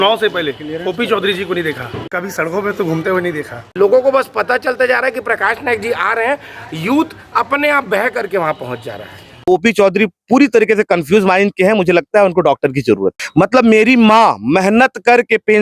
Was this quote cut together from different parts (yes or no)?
yes